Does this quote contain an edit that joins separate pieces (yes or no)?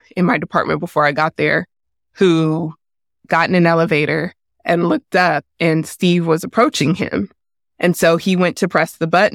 yes